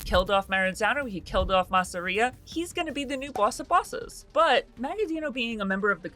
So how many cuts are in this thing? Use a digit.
1